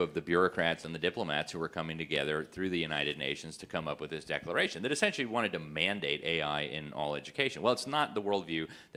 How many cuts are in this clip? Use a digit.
0